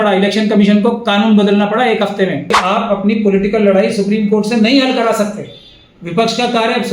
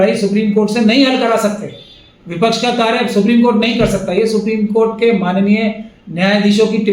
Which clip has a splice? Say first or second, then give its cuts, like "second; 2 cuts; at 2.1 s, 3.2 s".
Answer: first; 1 cut; at 2.6 s